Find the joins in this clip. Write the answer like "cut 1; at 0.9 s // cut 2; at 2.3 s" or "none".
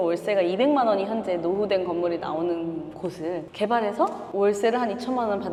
none